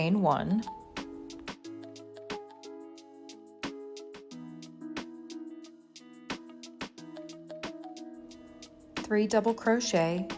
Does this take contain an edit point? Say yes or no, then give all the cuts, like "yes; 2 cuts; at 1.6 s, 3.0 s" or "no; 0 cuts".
yes; 2 cuts; at 1.1 s, 9.1 s